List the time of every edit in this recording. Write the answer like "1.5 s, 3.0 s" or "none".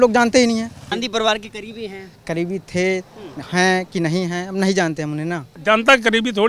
0.9 s, 5.5 s